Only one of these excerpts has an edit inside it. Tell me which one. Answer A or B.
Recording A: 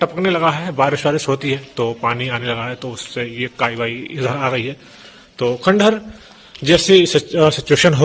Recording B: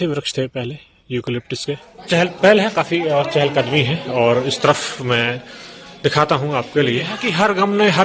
B